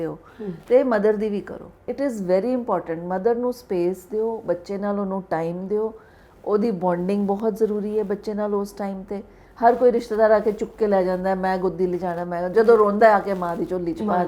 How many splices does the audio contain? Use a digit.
1